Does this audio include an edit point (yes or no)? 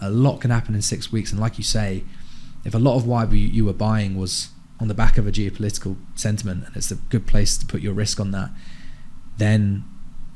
no